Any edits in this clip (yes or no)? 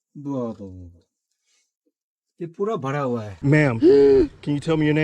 yes